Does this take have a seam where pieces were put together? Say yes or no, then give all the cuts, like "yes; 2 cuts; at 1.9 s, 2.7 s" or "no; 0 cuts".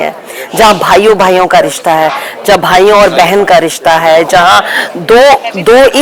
no; 0 cuts